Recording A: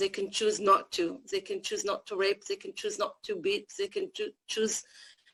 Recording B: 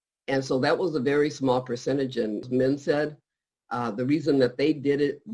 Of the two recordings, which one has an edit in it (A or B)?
B